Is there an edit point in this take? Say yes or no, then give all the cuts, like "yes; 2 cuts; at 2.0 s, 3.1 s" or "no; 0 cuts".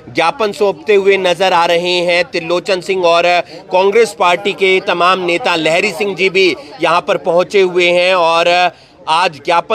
no; 0 cuts